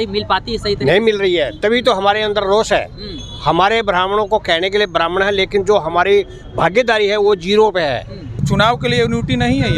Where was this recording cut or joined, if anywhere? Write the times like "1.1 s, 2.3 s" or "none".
8.4 s